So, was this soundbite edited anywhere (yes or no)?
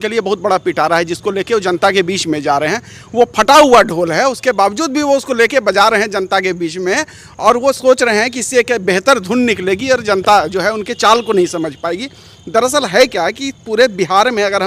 no